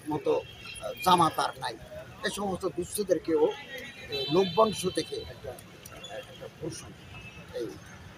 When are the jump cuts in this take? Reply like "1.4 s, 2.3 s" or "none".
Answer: none